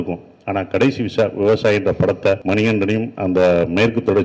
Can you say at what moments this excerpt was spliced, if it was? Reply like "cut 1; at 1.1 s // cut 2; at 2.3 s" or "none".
cut 1; at 2.4 s